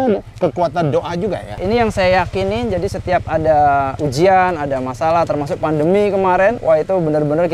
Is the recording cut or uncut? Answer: cut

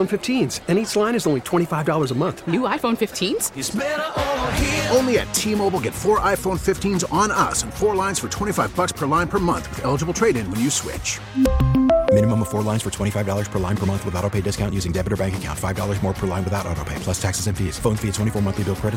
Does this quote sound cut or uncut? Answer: uncut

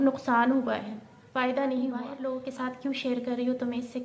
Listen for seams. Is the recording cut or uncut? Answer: cut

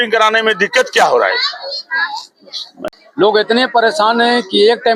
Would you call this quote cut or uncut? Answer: cut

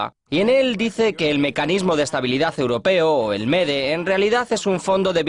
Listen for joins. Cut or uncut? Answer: uncut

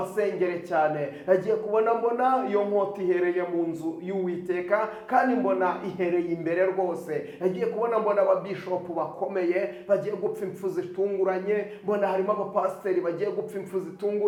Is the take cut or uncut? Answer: uncut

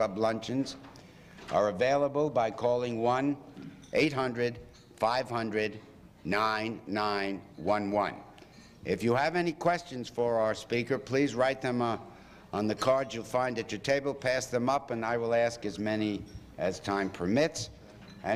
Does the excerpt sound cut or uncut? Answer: uncut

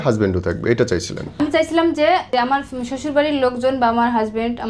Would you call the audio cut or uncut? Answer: cut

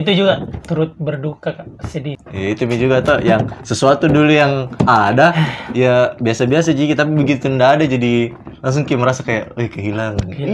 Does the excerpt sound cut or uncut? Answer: cut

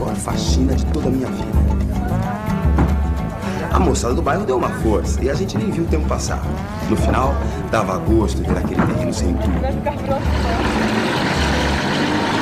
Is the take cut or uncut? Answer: uncut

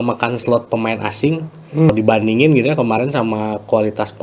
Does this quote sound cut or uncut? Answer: cut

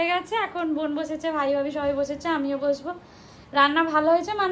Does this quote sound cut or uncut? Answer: uncut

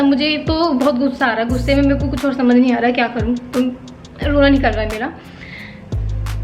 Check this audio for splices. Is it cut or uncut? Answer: uncut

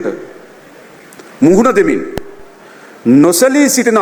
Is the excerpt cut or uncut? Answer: uncut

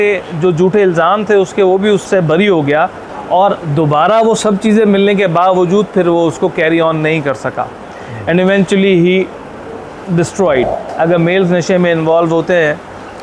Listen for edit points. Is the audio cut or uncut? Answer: cut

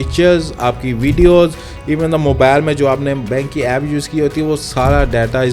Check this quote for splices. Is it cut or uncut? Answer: uncut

